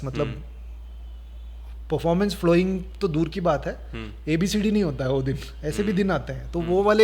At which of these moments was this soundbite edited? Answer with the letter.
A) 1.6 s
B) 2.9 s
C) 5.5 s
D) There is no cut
D